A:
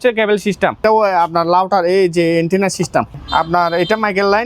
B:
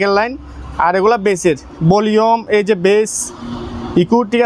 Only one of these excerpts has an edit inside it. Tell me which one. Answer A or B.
A